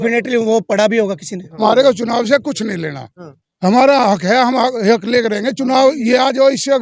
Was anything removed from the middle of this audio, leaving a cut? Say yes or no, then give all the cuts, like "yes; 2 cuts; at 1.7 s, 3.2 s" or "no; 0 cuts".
yes; 1 cut; at 1.6 s